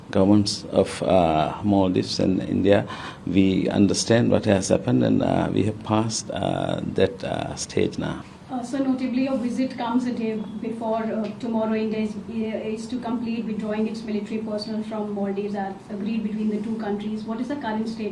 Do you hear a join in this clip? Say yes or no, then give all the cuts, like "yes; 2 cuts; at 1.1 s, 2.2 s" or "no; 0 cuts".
no; 0 cuts